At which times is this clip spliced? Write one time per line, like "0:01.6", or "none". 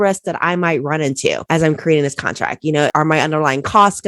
0:01.4
0:02.9